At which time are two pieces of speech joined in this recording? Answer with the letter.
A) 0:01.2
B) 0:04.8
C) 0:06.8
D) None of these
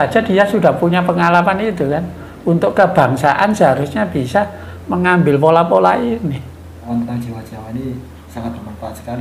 C